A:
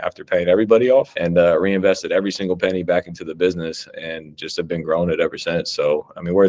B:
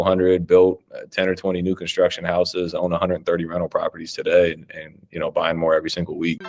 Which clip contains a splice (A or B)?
A